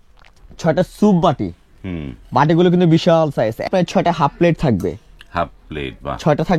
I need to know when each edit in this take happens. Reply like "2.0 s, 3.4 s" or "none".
3.7 s